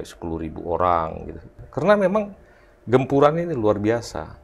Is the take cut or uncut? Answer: cut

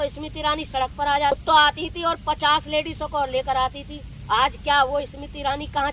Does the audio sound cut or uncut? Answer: cut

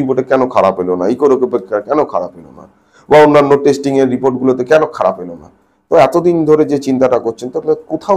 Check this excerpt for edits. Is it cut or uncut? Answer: uncut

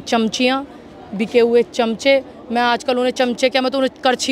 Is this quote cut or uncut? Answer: uncut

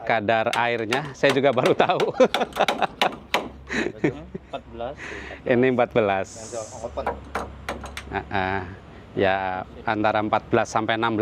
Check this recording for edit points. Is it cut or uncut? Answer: uncut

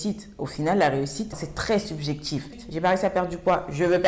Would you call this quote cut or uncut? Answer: cut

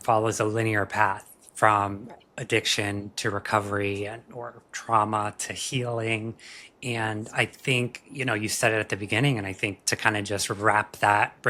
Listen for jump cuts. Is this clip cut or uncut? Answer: uncut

